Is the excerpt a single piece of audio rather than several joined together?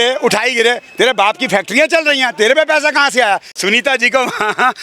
no; 1 cut; at 3.5 s

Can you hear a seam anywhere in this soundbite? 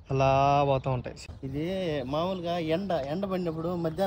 yes; 1 cut; at 1.1 s

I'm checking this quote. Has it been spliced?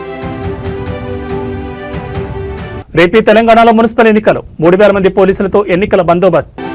yes; 2 cuts; at 1.7 s, 2.7 s

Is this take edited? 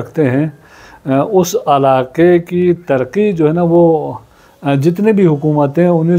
no; 0 cuts

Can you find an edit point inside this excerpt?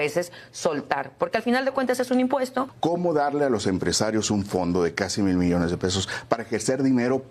yes; 1 cut; at 2.7 s

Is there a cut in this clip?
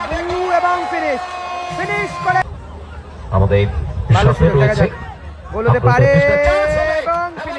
yes; 1 cut; at 2.4 s

